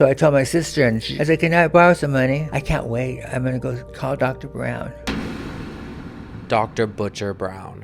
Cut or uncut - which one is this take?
cut